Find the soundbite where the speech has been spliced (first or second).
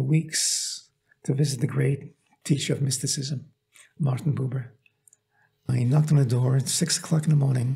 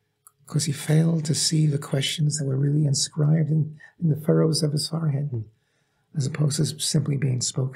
first